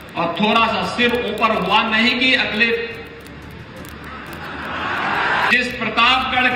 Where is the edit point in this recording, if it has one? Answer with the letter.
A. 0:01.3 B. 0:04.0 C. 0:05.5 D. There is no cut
C